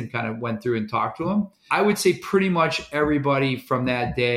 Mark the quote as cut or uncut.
cut